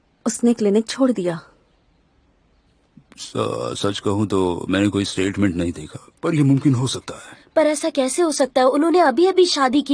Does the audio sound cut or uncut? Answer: uncut